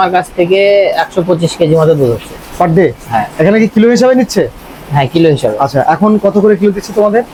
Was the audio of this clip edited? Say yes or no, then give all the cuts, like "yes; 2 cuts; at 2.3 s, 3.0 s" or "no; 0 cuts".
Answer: no; 0 cuts